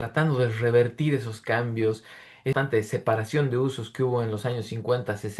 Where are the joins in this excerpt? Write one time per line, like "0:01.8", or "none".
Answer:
0:02.5